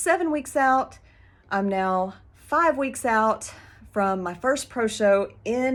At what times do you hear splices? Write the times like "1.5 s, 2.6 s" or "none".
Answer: none